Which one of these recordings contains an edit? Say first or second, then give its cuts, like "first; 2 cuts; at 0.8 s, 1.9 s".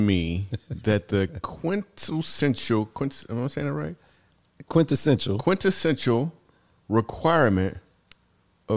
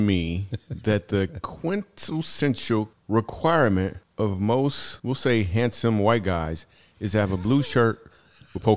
second; 3 cuts; at 2.9 s, 4.0 s, 4.9 s